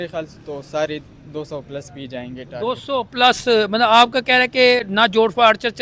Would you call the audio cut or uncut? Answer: uncut